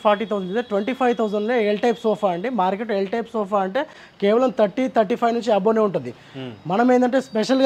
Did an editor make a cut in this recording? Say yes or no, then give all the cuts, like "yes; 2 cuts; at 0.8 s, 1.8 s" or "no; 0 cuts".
no; 0 cuts